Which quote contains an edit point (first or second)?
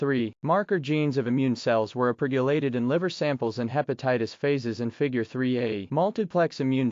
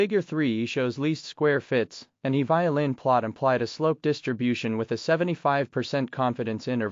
second